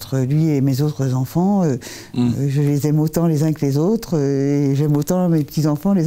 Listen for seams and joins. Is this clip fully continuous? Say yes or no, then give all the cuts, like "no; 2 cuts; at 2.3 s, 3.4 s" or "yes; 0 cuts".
yes; 0 cuts